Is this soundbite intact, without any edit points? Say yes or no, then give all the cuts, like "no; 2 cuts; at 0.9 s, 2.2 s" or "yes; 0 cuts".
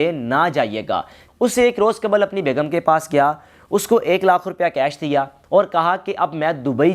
no; 1 cut; at 1.2 s